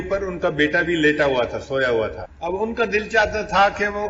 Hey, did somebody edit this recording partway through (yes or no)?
yes